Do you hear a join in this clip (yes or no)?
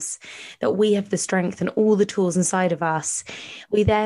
no